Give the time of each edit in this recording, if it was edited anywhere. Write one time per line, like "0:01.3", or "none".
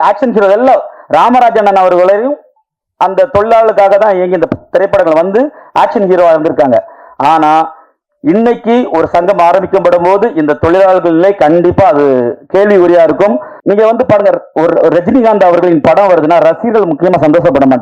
0:13.5